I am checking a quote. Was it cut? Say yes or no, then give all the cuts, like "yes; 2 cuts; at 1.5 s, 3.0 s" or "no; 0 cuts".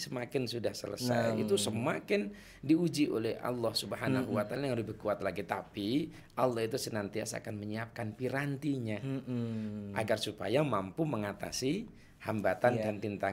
no; 0 cuts